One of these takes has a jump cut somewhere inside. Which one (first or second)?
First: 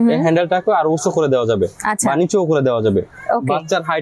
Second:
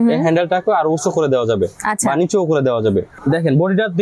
second